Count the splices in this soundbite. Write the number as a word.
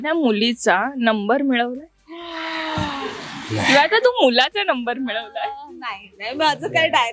zero